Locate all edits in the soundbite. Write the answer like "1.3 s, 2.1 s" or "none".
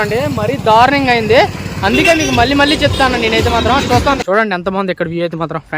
4.2 s